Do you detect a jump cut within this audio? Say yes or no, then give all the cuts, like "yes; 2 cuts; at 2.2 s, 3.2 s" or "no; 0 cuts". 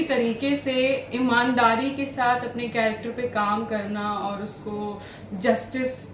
no; 0 cuts